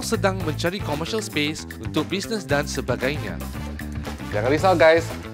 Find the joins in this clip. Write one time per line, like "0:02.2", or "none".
none